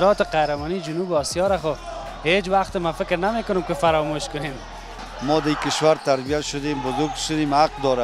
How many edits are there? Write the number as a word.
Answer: one